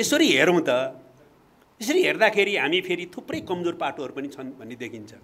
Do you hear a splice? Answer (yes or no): no